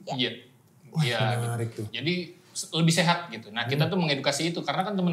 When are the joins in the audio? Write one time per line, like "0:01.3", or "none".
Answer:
none